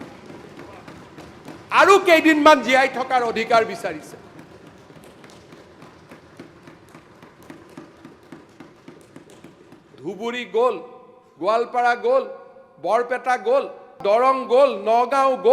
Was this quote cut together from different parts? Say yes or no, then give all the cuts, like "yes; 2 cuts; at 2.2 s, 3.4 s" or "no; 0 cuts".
yes; 1 cut; at 14.0 s